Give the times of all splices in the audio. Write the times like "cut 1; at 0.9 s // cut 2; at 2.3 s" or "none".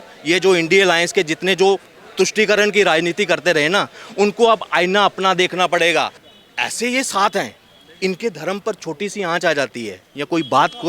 cut 1; at 6.2 s